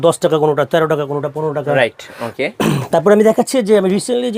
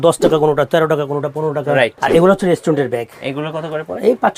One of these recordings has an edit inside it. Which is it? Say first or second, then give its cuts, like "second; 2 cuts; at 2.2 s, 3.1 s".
second; 1 cut; at 2.0 s